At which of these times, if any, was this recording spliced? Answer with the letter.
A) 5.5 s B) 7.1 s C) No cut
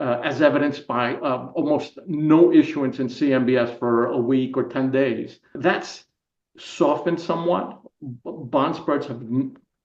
A